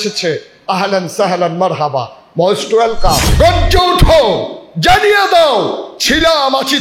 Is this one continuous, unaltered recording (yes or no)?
no